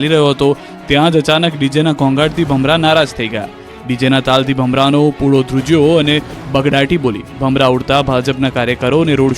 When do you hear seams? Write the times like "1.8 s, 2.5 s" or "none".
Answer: 7.3 s